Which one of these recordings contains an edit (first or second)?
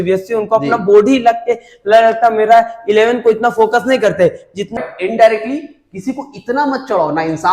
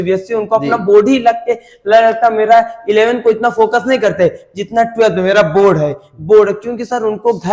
first